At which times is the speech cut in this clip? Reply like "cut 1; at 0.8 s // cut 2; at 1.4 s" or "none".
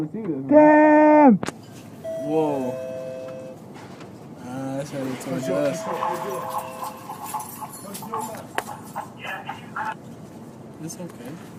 none